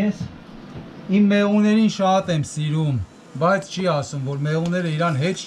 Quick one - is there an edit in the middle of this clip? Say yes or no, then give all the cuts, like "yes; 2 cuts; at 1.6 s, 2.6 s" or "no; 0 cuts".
no; 0 cuts